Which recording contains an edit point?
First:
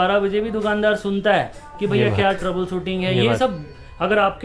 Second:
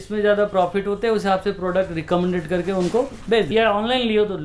second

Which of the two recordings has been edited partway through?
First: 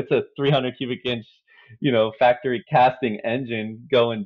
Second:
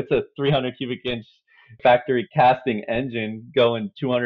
second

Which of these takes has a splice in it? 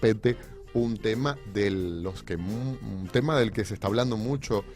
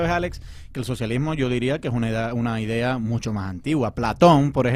first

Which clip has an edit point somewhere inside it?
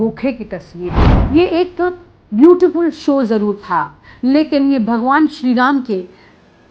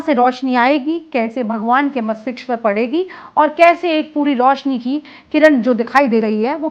first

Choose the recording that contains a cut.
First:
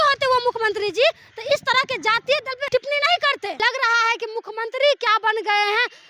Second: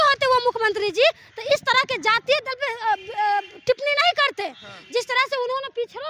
first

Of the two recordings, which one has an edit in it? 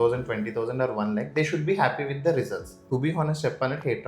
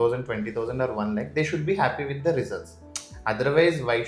first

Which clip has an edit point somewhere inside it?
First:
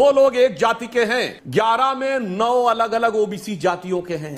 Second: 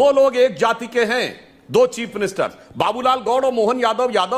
first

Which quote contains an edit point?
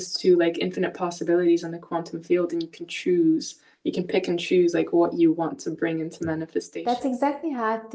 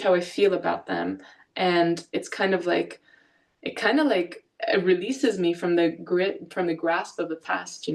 first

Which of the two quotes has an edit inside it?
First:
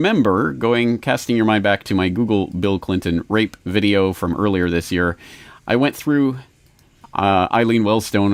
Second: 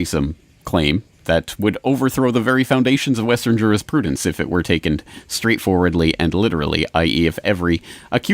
second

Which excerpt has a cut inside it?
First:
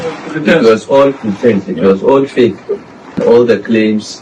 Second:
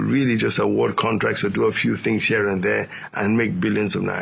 first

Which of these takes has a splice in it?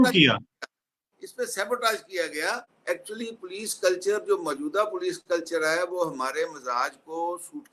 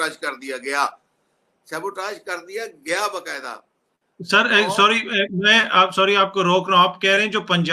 first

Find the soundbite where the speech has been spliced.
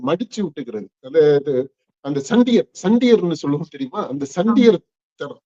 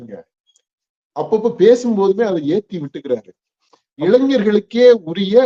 second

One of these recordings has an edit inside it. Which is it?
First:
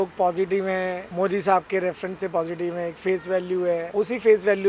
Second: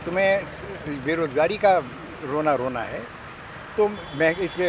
first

